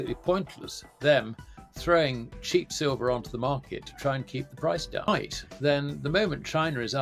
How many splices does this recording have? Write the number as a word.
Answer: one